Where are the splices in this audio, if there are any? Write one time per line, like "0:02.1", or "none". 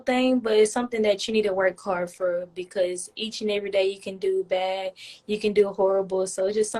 none